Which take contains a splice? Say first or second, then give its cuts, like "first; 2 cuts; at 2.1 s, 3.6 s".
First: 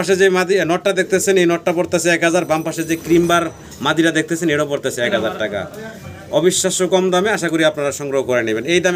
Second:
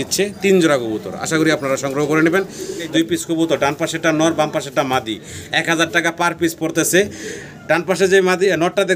second; 1 cut; at 2.9 s